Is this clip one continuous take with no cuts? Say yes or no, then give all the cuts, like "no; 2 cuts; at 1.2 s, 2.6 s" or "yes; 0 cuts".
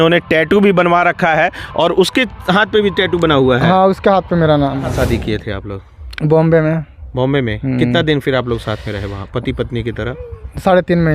no; 1 cut; at 5.0 s